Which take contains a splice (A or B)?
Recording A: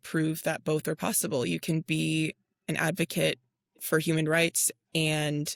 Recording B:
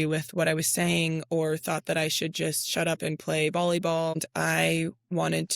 B